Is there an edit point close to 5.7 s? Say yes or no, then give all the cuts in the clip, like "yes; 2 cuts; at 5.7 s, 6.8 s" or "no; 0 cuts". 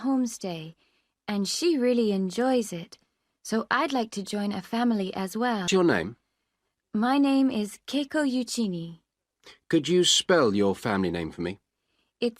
yes; 1 cut; at 5.7 s